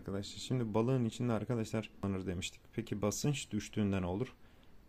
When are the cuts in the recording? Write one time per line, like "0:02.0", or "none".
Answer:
0:02.0